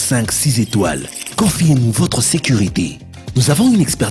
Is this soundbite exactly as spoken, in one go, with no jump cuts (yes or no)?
yes